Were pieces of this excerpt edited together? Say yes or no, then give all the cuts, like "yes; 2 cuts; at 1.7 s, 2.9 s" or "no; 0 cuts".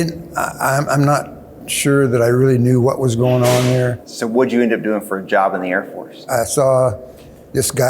yes; 2 cuts; at 4.1 s, 6.3 s